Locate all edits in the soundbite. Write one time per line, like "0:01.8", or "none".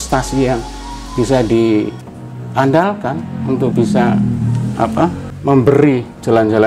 0:05.4